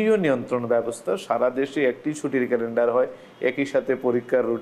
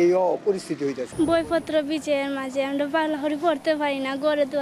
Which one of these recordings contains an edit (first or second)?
second